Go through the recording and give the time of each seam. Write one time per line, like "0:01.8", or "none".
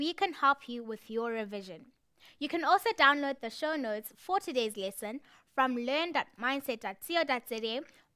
none

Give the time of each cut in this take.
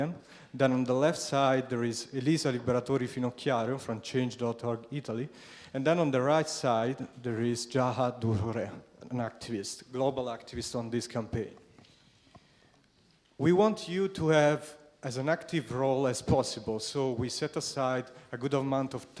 0:07.2

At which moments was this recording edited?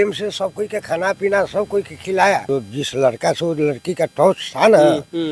0:02.4

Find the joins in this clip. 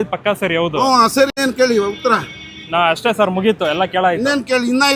0:01.4

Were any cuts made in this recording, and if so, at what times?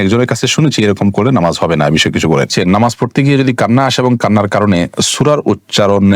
0:02.5

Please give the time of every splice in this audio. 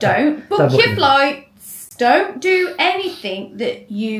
0:01.8

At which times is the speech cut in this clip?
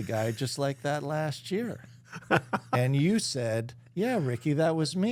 none

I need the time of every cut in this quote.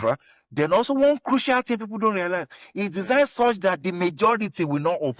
none

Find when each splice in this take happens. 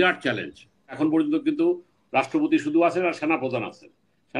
0:01.0

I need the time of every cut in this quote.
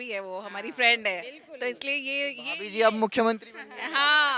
none

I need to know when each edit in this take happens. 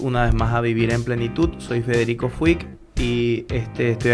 none

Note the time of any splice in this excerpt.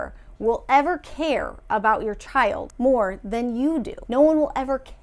0:02.7
0:04.0

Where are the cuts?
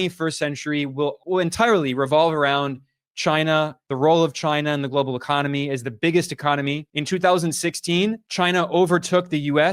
none

